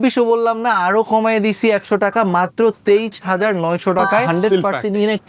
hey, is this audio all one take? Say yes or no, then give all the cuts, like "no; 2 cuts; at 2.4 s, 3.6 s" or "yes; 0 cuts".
no; 1 cut; at 4.3 s